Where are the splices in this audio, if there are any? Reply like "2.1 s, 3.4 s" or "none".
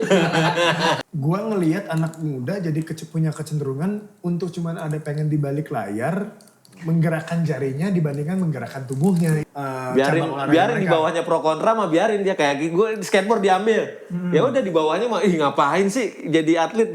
1.0 s, 9.4 s